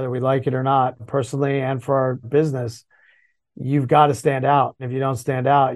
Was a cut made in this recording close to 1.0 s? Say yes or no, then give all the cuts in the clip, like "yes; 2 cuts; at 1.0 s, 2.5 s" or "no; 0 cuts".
yes; 3 cuts; at 1.0 s, 2.3 s, 4.8 s